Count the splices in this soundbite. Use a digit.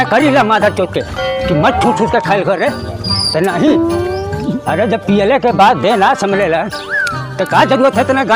1